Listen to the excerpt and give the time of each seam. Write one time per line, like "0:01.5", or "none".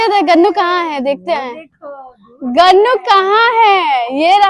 none